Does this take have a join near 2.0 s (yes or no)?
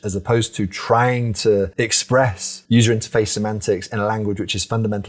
yes